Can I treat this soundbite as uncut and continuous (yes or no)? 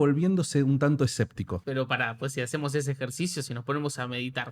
no